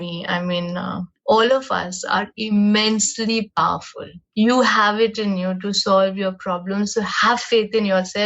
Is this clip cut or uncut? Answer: cut